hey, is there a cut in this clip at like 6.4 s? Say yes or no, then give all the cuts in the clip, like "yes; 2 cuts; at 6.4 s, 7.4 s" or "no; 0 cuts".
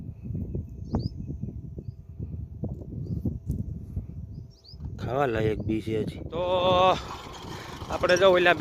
yes; 1 cut; at 6.4 s